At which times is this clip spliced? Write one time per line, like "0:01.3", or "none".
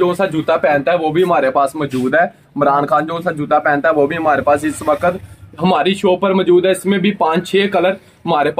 none